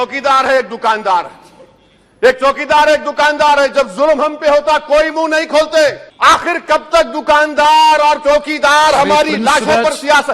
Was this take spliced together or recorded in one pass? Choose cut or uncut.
cut